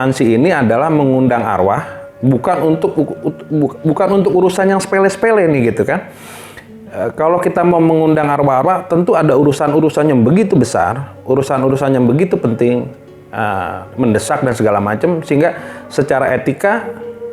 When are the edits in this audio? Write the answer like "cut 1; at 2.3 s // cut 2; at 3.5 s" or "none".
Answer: none